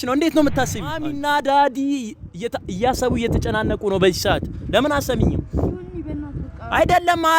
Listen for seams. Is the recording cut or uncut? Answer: cut